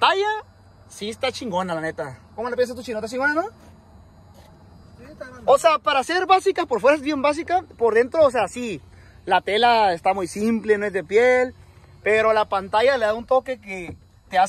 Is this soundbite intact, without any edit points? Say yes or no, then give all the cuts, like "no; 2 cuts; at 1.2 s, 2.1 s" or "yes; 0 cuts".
yes; 0 cuts